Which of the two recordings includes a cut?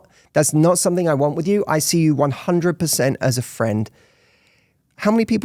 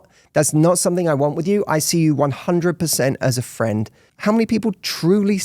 second; 1 cut; at 4.0 s

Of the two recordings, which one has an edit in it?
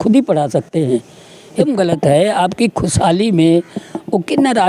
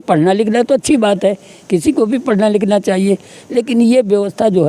first; 1 cut; at 1.6 s

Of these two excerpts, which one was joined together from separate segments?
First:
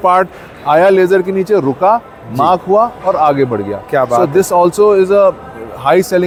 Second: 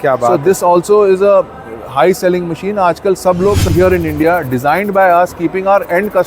second; 1 cut; at 3.7 s

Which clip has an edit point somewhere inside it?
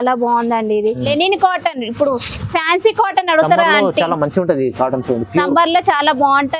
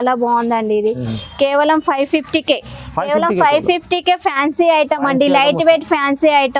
first; 1 cut; at 1.0 s

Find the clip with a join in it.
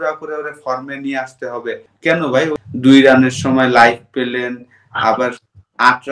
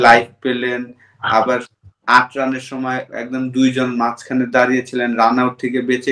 first; 2 cuts; at 1.9 s, 2.5 s

